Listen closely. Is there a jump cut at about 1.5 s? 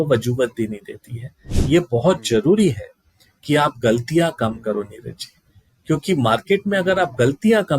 yes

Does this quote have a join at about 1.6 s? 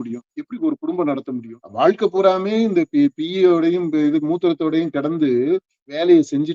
yes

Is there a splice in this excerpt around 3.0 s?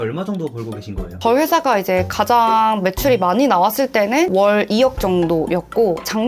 no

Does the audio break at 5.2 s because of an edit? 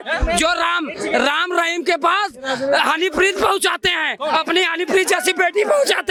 no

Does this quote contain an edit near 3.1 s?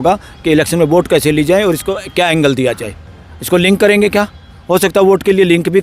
yes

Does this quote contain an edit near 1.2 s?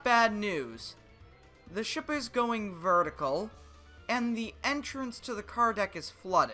no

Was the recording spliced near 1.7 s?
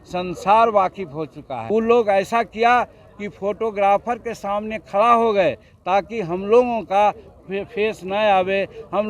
yes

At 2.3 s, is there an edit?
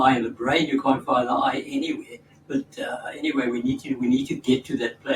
no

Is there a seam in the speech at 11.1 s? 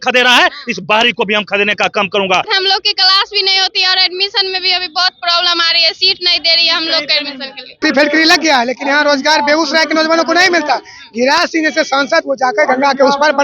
no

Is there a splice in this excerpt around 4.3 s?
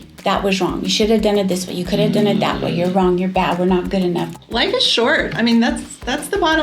yes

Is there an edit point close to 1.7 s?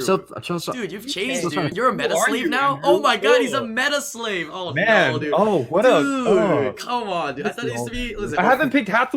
yes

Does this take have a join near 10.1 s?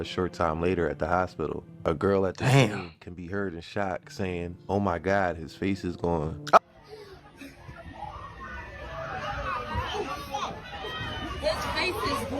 no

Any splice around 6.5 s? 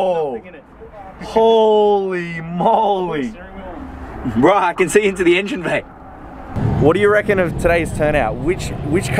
yes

